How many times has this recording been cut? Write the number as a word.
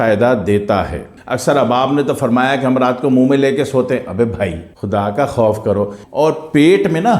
two